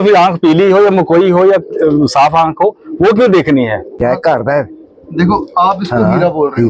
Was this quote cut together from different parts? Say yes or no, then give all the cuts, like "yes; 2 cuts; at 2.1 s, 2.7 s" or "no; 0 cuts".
yes; 1 cut; at 4.0 s